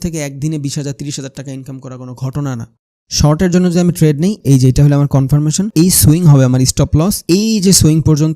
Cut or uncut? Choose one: cut